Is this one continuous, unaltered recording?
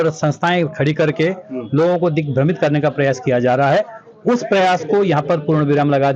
yes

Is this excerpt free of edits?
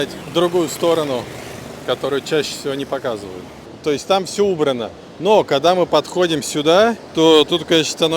no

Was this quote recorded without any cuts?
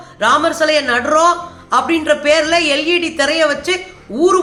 yes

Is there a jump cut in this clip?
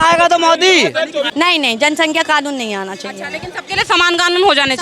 yes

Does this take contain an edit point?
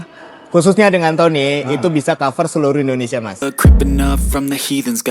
yes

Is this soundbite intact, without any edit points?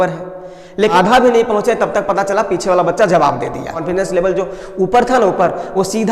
no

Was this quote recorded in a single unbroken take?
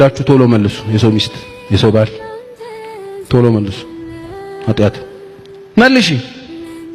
yes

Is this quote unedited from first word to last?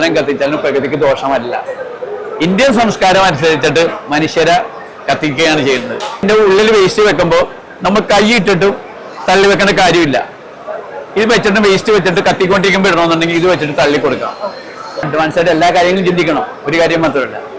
no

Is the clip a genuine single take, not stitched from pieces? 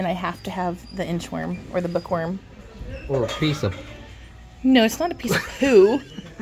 yes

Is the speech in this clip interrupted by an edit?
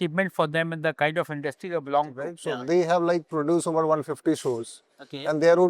yes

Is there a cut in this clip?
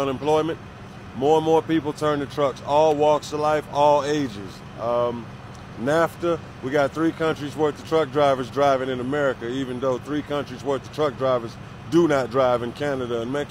yes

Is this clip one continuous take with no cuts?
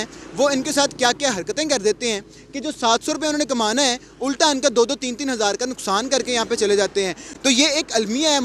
yes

